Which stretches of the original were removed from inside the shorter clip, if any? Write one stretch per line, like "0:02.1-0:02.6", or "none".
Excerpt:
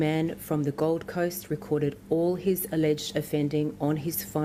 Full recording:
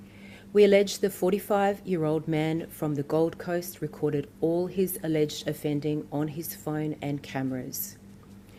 none